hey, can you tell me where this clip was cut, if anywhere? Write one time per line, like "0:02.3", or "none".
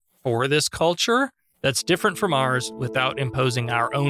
none